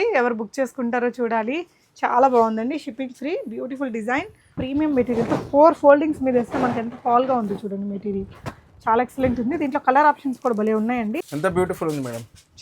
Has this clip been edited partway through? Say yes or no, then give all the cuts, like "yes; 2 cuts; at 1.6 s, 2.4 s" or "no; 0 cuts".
yes; 2 cuts; at 4.6 s, 11.2 s